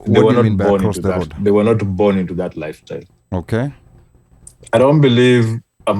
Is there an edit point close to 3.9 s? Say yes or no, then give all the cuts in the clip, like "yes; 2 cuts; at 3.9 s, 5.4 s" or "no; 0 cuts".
yes; 1 cut; at 3.9 s